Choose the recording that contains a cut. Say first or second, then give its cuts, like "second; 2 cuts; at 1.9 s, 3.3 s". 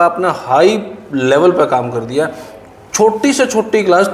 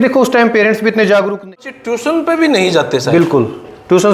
second; 1 cut; at 1.5 s